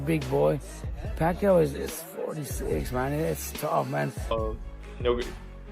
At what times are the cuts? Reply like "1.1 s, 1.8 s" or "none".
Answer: 4.3 s